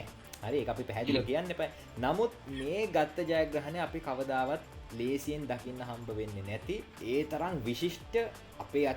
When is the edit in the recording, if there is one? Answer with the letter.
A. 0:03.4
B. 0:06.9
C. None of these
B